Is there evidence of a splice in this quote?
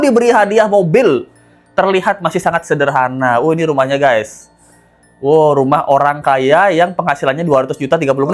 no; 0 cuts

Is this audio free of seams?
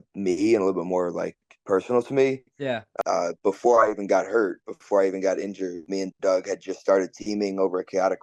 no; 2 cuts; at 2.9 s, 5.8 s

